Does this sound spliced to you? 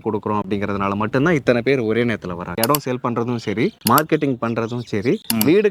no; 0 cuts

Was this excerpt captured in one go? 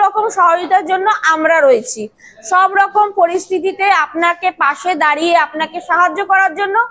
yes; 0 cuts

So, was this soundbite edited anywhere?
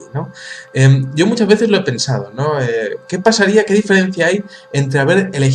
yes; 1 cut; at 3.3 s

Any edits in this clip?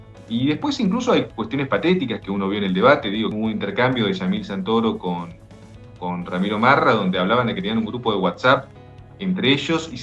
yes; 1 cut; at 3.3 s

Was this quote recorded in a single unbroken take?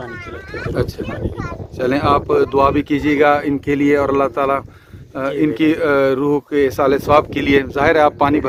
yes; 0 cuts

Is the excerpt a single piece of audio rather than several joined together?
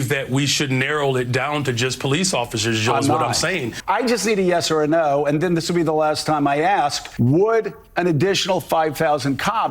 no; 2 cuts; at 3.7 s, 7.0 s

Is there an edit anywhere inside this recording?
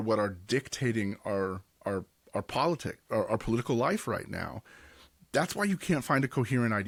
no; 0 cuts

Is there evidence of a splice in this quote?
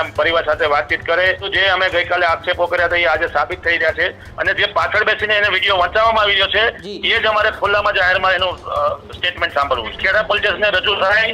yes; 3 cuts; at 1.5 s, 4.3 s, 9.9 s

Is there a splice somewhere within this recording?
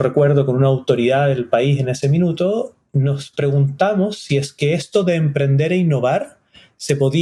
no; 0 cuts

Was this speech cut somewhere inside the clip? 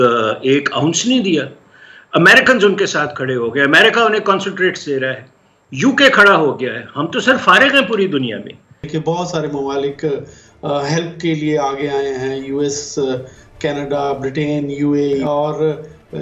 yes; 2 cuts; at 8.9 s, 15.2 s

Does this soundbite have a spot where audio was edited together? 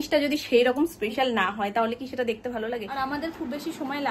yes; 1 cut; at 2.9 s

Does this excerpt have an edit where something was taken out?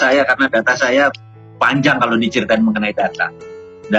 no; 0 cuts

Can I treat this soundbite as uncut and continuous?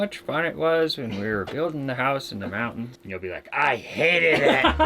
no; 1 cut; at 3.0 s

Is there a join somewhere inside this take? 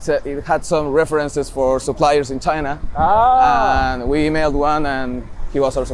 no; 0 cuts

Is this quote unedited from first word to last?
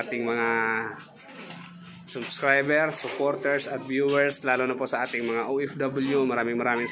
yes; 0 cuts

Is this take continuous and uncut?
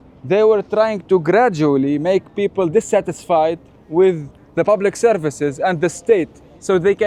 yes; 0 cuts

